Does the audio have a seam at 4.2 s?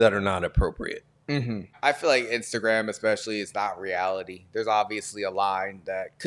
no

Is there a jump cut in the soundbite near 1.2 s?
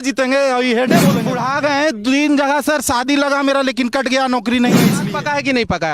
yes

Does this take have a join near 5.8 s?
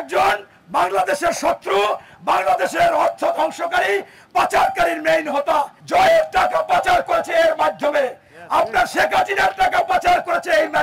yes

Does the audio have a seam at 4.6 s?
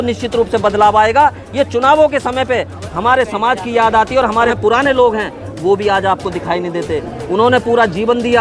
yes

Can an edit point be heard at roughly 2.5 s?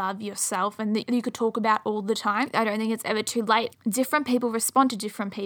yes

